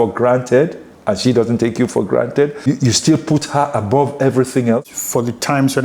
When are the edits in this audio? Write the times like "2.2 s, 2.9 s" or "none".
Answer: 2.7 s, 4.9 s